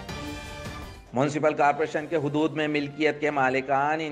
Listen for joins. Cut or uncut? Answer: cut